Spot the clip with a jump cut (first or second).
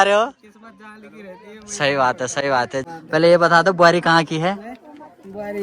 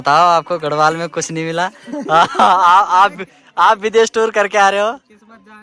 first